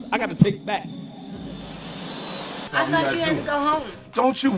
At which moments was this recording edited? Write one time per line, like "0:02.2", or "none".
0:02.7